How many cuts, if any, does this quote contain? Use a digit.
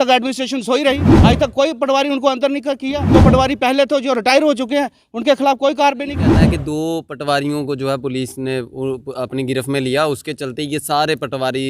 3